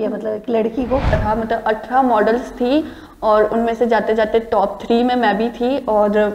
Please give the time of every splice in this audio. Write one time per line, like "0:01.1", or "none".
0:01.1